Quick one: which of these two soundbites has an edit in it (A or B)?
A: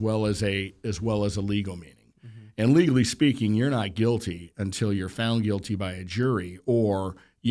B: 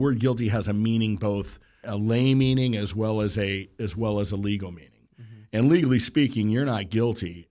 B